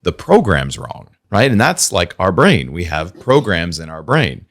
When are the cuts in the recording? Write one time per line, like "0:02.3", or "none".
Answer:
0:01.2